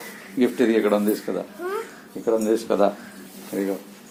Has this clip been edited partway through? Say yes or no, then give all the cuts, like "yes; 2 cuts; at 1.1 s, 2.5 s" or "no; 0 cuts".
no; 0 cuts